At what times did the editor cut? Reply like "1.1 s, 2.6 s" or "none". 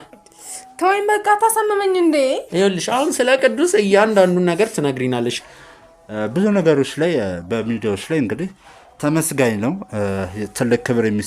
5.4 s